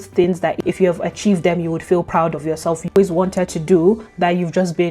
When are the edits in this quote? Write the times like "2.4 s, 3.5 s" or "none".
3.0 s